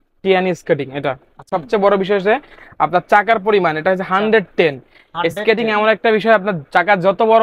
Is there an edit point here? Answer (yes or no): yes